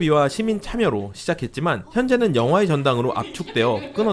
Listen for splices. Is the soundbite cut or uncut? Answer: uncut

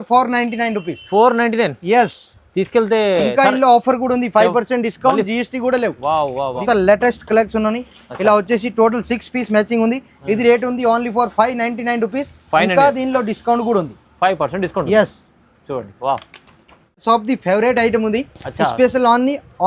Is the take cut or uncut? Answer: cut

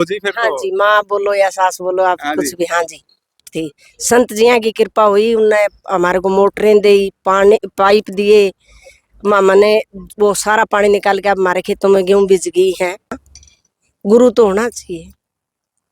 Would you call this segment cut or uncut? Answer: cut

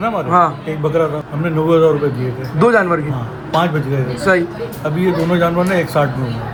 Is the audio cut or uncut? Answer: uncut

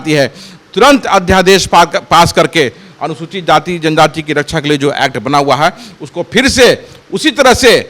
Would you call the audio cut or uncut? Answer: uncut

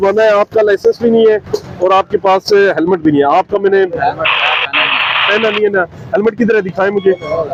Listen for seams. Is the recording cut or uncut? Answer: uncut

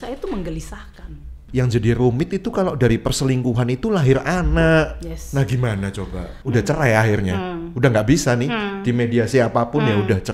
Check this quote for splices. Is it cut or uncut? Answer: cut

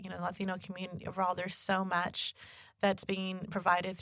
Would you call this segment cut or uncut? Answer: uncut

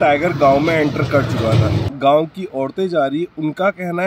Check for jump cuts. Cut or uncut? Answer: cut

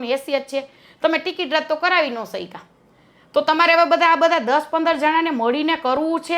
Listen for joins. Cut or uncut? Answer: uncut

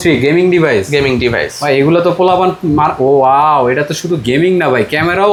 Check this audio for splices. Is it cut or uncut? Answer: uncut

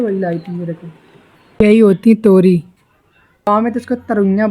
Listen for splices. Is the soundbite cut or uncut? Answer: cut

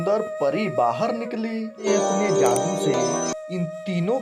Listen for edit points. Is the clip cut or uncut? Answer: cut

